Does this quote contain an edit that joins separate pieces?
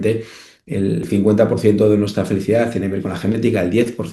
yes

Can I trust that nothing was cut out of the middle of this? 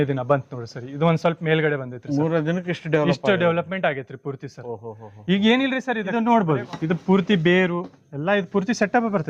no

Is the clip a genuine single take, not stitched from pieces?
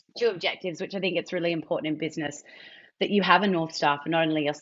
yes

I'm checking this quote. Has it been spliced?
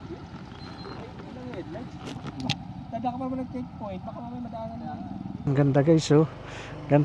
yes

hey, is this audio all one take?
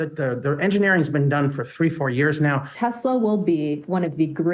no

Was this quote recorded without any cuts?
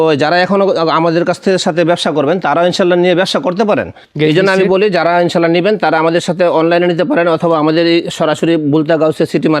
no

